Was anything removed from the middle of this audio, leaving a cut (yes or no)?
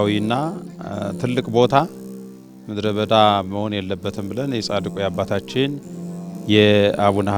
no